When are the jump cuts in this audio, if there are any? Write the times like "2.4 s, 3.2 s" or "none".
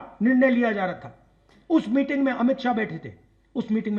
none